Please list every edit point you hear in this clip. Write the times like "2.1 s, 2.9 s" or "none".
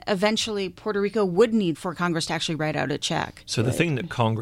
1.8 s